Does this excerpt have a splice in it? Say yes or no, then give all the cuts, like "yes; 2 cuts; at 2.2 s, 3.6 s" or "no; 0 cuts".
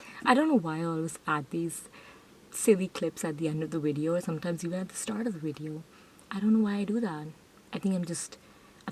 no; 0 cuts